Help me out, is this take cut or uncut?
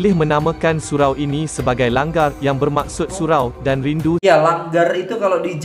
cut